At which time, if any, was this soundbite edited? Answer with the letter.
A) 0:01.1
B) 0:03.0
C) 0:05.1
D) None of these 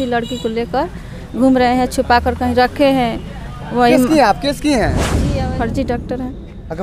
C